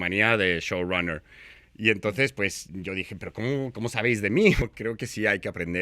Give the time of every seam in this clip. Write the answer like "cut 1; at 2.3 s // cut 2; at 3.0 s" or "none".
cut 1; at 4.7 s

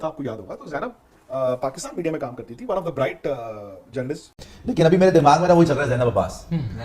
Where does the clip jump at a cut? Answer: cut 1; at 4.5 s

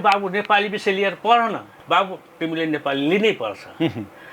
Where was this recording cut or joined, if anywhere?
cut 1; at 1.7 s

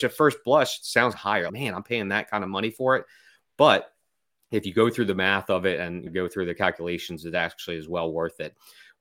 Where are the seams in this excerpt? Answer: cut 1; at 1.2 s // cut 2; at 6.1 s

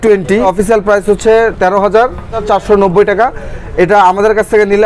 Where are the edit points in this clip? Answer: none

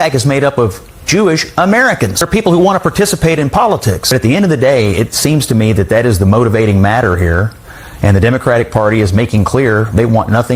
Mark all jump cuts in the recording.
cut 1; at 2.3 s // cut 2; at 4.1 s

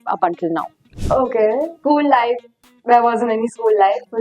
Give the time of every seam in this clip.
cut 1; at 1.7 s

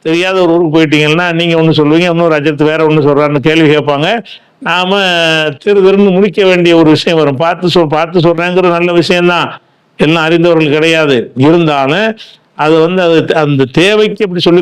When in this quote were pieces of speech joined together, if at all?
none

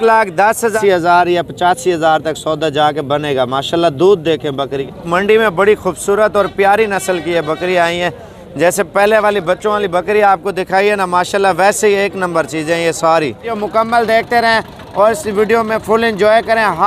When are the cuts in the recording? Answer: cut 1; at 0.8 s // cut 2; at 4.9 s // cut 3; at 13.6 s

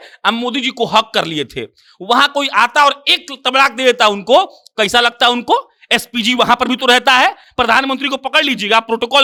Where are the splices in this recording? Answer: none

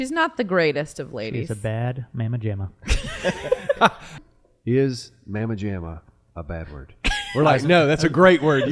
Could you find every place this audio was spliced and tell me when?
cut 1; at 4.1 s

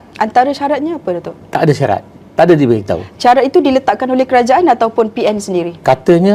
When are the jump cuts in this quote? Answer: none

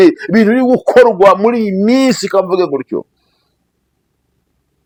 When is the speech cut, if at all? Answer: none

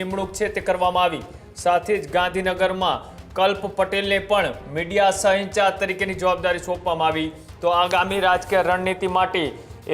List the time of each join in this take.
none

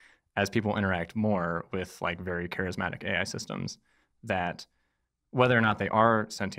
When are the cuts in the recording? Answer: none

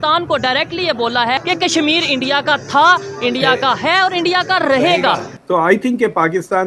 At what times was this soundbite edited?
cut 1; at 1.4 s // cut 2; at 5.4 s

